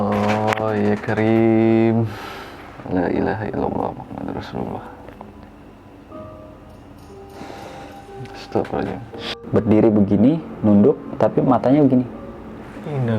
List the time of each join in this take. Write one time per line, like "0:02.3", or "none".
0:09.4